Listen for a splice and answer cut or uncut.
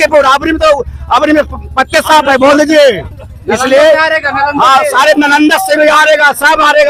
uncut